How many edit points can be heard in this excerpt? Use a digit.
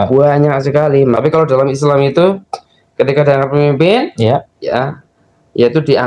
1